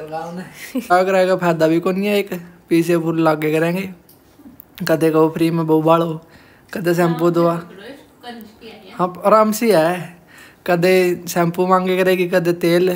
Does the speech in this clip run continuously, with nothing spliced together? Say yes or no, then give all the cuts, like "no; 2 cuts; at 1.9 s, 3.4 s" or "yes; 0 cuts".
no; 1 cut; at 0.9 s